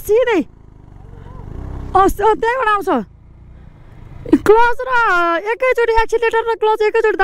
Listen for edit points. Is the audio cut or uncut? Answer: uncut